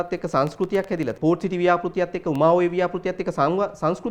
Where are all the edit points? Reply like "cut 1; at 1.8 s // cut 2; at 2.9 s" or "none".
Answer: cut 1; at 1.1 s